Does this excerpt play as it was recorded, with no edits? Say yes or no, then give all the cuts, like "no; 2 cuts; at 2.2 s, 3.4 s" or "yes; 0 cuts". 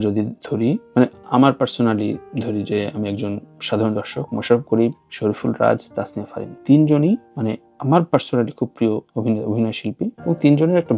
yes; 0 cuts